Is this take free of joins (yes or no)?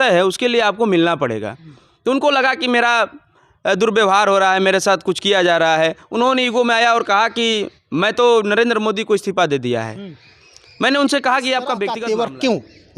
no